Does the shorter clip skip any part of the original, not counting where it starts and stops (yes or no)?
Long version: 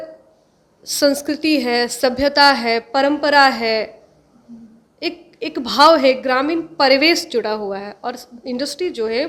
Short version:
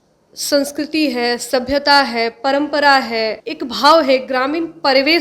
yes